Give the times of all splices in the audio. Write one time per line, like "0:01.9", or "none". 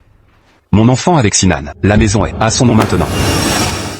0:03.1